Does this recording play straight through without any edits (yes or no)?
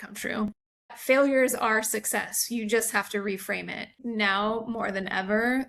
no